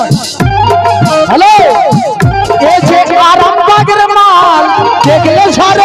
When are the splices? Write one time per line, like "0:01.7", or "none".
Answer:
none